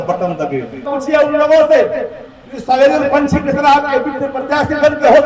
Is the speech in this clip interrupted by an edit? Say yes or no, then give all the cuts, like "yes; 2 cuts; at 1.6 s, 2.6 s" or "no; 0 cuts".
yes; 1 cut; at 0.9 s